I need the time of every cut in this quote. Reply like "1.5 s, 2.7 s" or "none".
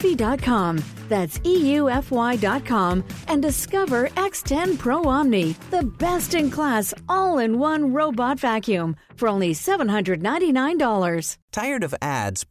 11.4 s